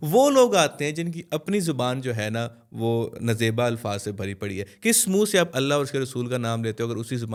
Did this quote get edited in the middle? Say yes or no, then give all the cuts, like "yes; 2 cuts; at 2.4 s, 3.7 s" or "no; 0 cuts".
no; 0 cuts